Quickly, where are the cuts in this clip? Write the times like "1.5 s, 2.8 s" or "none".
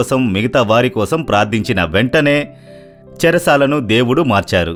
none

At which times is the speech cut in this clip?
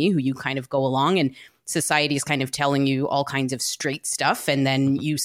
none

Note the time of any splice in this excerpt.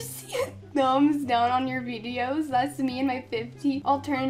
none

